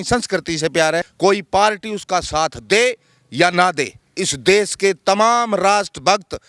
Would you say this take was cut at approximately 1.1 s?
yes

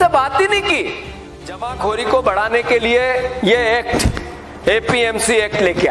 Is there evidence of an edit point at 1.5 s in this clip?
yes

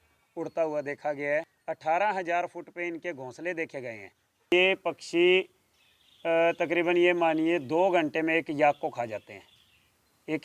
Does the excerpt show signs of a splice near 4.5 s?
yes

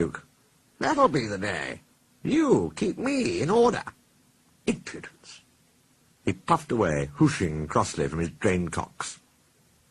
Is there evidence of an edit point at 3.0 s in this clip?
yes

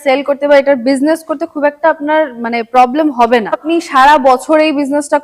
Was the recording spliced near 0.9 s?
no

